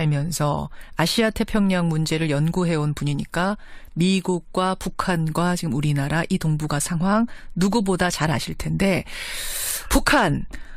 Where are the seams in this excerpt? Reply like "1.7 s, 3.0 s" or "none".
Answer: none